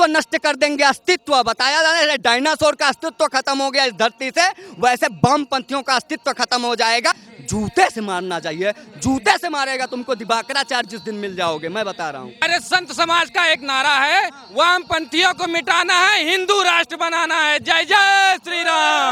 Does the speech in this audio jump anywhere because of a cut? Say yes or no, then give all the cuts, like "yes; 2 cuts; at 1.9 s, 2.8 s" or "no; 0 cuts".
yes; 2 cuts; at 7.3 s, 12.4 s